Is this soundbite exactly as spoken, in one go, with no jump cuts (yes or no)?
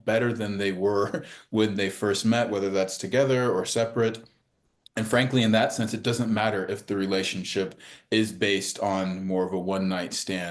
yes